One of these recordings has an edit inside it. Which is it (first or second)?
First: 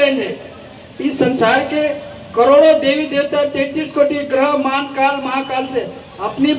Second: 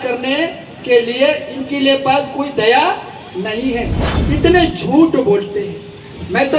second